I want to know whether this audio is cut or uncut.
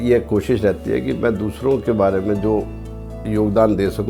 uncut